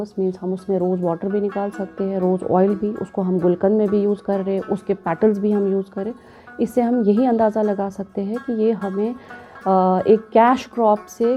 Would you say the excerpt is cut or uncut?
uncut